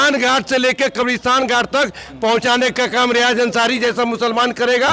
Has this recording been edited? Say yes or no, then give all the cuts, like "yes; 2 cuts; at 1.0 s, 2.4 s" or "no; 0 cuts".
no; 0 cuts